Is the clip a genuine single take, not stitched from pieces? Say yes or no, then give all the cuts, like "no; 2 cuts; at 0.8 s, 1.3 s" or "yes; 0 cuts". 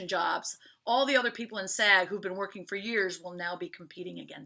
yes; 0 cuts